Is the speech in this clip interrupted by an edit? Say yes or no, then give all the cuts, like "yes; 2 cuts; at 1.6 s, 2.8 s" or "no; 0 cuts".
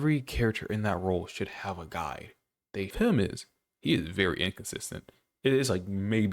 yes; 1 cut; at 2.9 s